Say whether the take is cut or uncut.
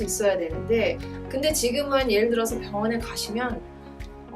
uncut